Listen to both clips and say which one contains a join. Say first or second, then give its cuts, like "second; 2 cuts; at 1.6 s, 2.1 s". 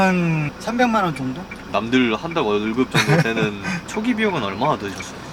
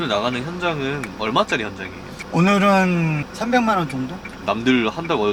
first; 1 cut; at 3.8 s